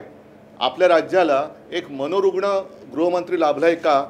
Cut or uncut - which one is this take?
uncut